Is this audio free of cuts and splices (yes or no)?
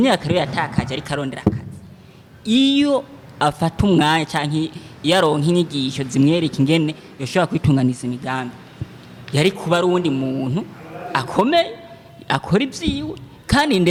yes